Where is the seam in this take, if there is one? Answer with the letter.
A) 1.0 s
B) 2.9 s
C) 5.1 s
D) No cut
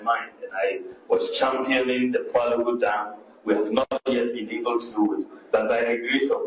D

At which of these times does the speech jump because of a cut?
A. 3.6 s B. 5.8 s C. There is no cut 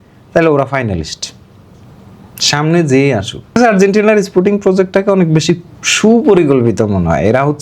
A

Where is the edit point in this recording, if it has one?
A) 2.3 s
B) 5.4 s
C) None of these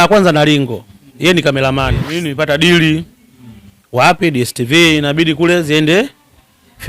A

